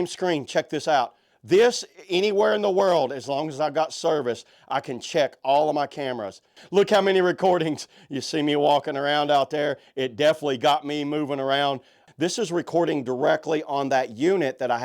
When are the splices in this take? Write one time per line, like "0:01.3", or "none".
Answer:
0:06.6
0:12.0